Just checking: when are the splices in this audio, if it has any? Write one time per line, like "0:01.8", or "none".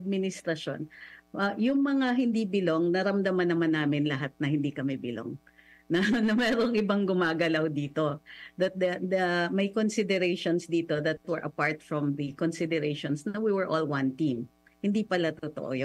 none